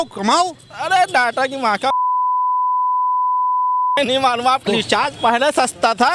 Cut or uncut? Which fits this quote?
uncut